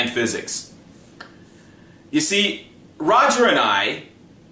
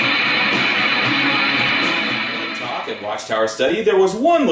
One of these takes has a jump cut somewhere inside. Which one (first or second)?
second